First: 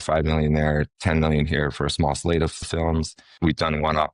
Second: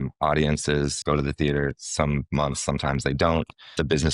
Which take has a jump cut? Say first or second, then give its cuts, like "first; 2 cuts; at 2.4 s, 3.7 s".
first; 2 cuts; at 0.9 s, 3.2 s